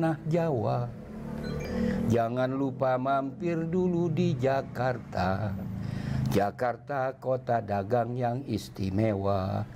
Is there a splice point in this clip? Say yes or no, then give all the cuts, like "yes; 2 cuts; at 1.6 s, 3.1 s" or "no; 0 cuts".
no; 0 cuts